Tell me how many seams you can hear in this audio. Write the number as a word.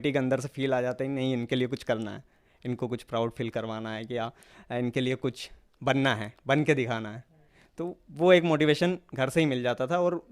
zero